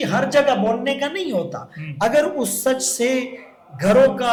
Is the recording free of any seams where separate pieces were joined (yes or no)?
yes